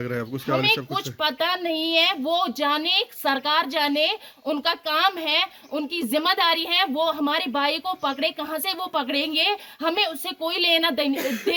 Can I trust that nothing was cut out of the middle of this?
yes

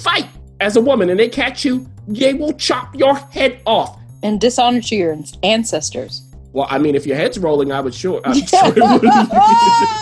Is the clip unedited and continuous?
no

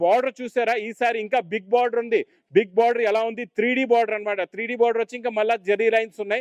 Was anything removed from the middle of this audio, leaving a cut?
no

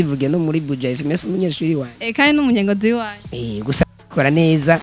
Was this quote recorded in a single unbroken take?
yes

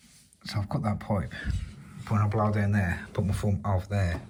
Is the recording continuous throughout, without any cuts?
yes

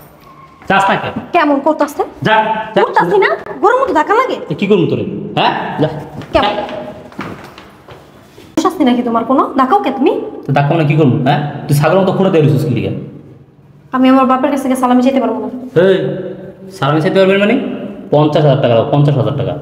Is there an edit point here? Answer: no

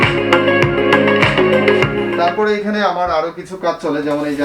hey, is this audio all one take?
no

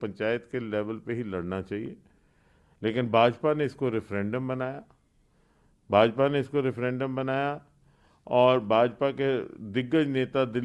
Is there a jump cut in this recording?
no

